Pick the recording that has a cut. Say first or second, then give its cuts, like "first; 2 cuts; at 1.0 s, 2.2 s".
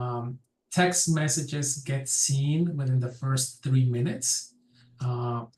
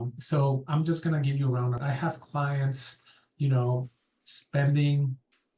second; 1 cut; at 1.8 s